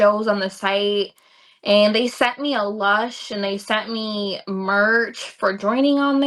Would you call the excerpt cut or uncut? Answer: uncut